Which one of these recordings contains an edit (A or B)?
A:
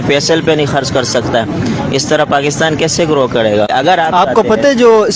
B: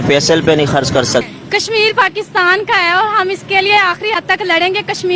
B